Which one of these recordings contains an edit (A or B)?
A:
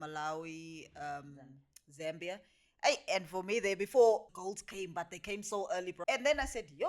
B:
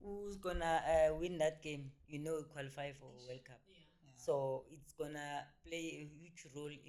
A